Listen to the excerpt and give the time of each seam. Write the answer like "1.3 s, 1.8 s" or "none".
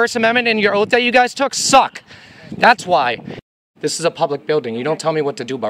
3.3 s